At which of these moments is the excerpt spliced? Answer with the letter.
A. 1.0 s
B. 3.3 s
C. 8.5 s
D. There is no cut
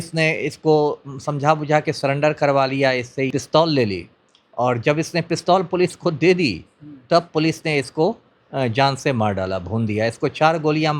B